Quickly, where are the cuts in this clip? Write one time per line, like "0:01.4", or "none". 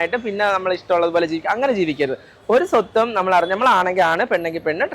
none